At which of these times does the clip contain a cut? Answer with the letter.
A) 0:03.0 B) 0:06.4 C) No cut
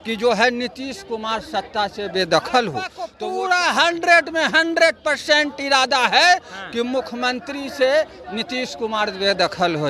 A